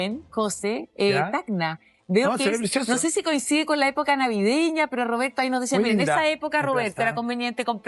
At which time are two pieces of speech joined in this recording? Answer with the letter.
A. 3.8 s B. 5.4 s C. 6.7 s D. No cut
D